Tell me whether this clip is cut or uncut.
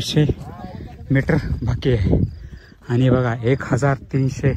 uncut